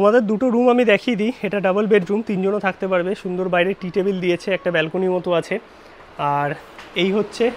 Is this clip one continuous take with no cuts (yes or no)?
yes